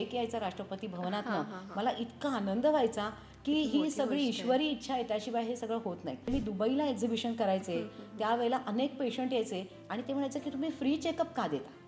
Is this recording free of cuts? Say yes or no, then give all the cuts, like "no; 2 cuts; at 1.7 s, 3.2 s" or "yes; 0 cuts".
no; 1 cut; at 6.3 s